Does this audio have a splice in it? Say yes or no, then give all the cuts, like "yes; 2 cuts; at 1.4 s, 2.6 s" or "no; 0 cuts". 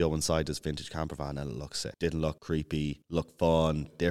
yes; 2 cuts; at 1.8 s, 2.7 s